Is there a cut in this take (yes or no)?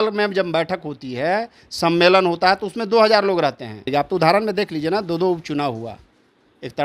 yes